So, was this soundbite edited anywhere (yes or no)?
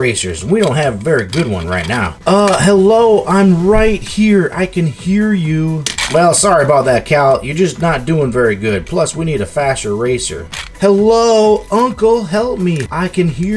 no